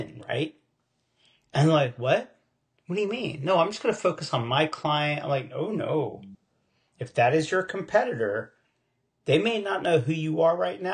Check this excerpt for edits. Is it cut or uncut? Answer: uncut